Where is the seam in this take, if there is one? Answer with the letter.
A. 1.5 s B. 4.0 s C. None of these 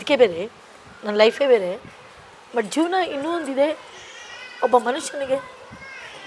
C